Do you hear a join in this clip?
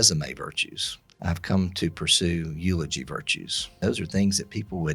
yes; 2 cuts; at 1.2 s, 3.8 s

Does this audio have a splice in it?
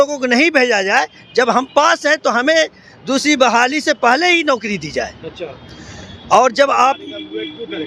no; 0 cuts

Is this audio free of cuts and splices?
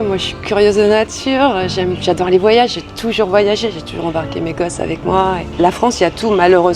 no; 1 cut; at 5.5 s

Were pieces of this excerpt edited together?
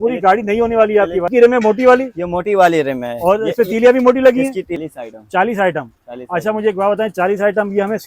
yes; 2 cuts; at 1.3 s, 4.8 s

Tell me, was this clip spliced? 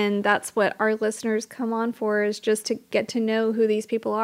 yes; 1 cut; at 2.8 s

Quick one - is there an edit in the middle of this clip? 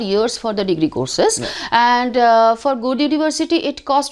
no; 0 cuts

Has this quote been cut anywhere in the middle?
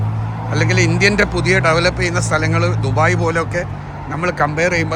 no; 0 cuts

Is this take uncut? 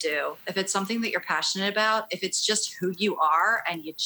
yes; 0 cuts

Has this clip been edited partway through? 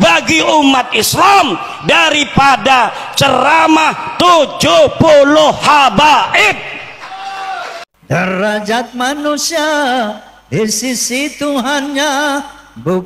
yes; 1 cut; at 8.2 s

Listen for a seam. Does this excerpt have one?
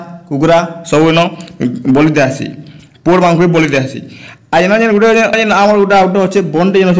yes; 1 cut; at 5.3 s

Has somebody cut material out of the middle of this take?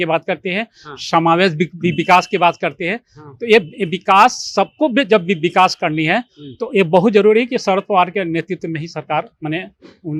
no; 0 cuts

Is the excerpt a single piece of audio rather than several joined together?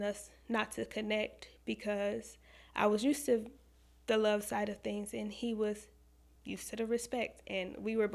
yes; 0 cuts

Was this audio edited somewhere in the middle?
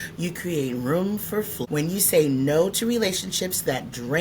yes; 1 cut; at 1.5 s

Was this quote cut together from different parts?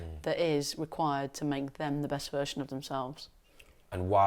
no; 0 cuts

